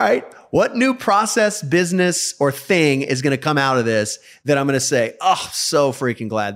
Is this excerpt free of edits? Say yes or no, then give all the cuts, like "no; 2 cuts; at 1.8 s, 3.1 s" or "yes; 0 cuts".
yes; 0 cuts